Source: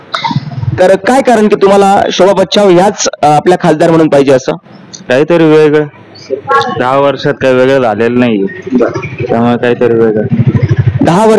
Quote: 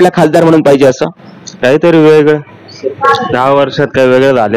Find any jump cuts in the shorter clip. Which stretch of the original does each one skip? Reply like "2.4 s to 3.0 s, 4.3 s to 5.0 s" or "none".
none